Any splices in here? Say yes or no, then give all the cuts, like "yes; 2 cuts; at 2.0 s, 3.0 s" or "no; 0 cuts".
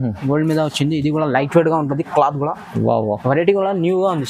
no; 0 cuts